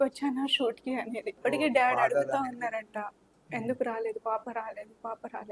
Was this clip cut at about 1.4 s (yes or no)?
yes